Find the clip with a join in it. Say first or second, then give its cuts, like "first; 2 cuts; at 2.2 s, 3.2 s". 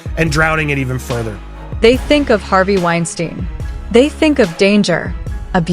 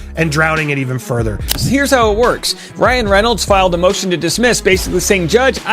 second; 1 cut; at 1.5 s